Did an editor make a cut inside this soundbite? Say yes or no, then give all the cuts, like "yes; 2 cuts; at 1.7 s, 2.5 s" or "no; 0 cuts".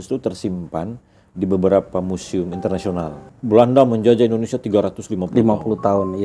yes; 1 cut; at 3.3 s